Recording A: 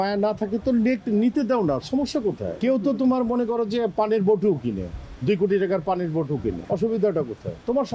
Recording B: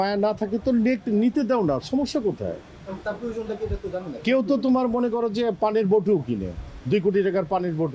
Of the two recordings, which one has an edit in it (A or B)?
A